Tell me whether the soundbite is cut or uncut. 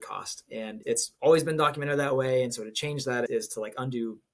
cut